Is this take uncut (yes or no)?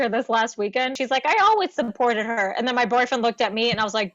no